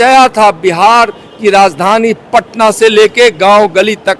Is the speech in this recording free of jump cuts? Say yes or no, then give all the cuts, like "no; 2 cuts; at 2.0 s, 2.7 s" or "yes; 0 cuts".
yes; 0 cuts